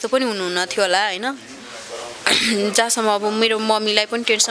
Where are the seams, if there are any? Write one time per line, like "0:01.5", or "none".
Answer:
none